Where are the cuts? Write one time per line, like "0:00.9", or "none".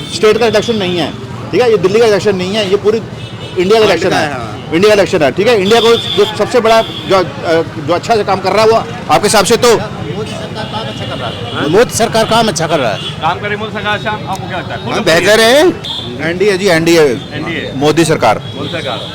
0:15.8